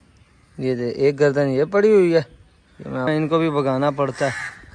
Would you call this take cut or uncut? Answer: cut